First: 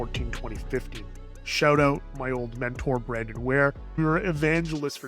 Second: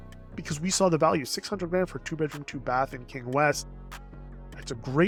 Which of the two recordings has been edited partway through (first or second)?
first